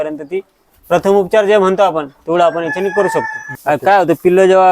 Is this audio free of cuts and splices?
no; 1 cut; at 3.4 s

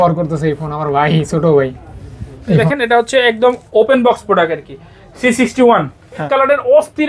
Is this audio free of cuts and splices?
no; 2 cuts; at 2.6 s, 6.3 s

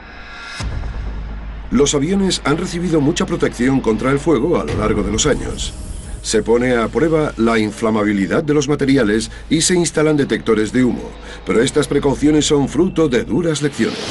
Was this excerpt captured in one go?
yes; 0 cuts

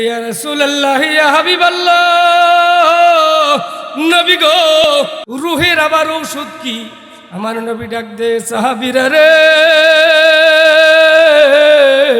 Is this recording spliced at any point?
yes; 1 cut; at 4.9 s

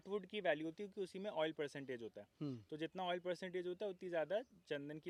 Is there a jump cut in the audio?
no; 0 cuts

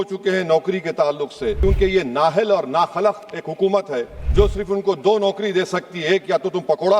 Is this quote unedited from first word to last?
no; 2 cuts; at 1.6 s, 4.2 s

